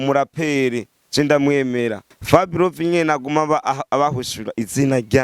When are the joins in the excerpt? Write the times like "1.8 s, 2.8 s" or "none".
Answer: 2.1 s